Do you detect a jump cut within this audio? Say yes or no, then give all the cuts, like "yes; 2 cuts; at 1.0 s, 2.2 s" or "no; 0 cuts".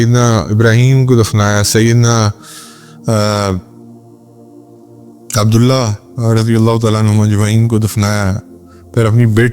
yes; 2 cuts; at 3.9 s, 5.3 s